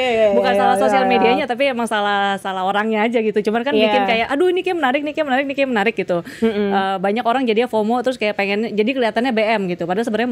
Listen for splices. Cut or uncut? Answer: uncut